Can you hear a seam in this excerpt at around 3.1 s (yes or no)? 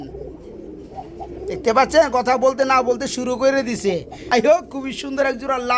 no